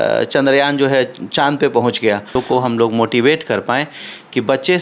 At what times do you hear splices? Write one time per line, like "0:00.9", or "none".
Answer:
0:02.4

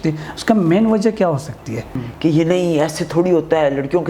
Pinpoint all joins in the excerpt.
0:02.1

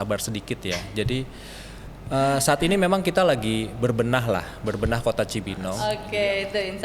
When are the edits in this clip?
0:05.8

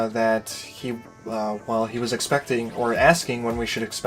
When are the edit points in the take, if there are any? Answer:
none

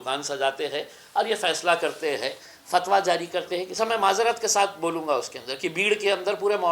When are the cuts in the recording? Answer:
0:03.8

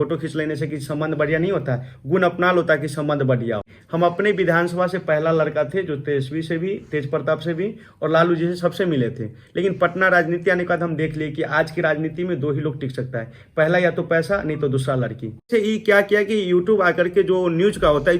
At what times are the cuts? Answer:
0:03.8
0:15.5

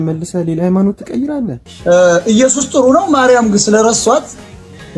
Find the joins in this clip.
0:01.6

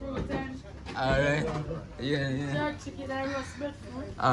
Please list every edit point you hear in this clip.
none

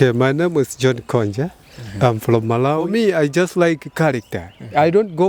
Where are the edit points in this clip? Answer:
0:02.9

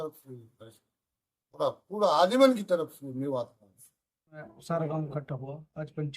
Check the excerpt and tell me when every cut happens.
0:04.5

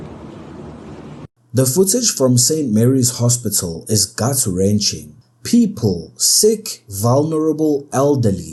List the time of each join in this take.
none

